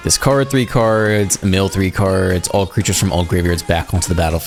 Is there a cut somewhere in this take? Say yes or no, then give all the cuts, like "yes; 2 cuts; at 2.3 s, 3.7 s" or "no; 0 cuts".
no; 0 cuts